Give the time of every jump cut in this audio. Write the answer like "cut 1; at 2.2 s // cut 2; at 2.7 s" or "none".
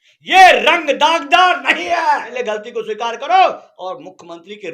cut 1; at 2.3 s